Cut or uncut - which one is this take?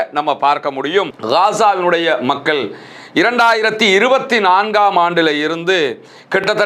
cut